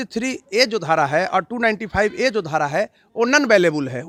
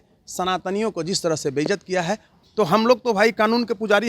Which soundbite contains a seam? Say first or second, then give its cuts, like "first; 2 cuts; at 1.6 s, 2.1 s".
second; 1 cut; at 2.3 s